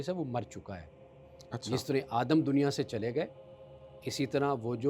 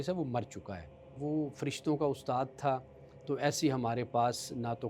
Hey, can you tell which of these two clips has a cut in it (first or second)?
second